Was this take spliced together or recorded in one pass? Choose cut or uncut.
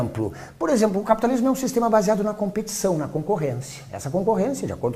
uncut